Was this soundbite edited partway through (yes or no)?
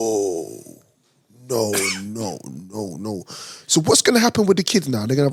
no